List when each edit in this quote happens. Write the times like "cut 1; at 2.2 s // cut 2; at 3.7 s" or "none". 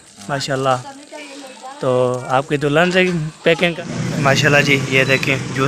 cut 1; at 3.7 s